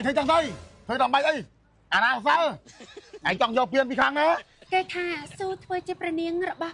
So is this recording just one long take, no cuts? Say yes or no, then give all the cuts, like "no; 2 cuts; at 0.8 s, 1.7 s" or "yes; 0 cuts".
no; 1 cut; at 4.5 s